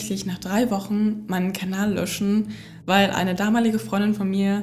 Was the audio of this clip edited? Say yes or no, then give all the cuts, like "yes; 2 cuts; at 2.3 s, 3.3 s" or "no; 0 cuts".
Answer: no; 0 cuts